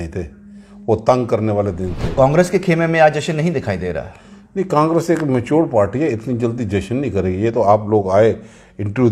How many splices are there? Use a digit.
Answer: 1